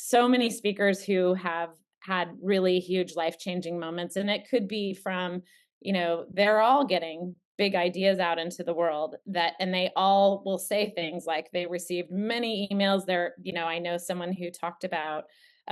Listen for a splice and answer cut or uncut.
uncut